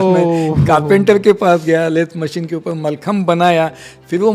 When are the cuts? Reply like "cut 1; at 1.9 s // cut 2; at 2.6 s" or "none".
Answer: none